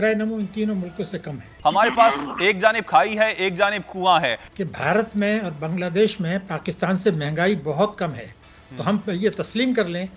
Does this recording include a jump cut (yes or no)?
yes